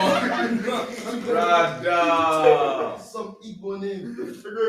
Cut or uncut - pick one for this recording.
uncut